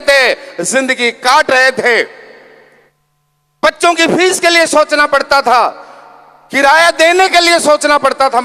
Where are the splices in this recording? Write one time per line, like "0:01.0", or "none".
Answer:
none